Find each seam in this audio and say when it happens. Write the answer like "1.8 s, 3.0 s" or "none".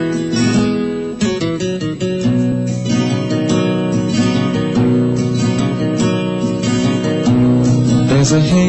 none